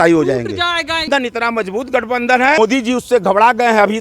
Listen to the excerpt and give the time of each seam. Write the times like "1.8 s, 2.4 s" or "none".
1.1 s, 2.6 s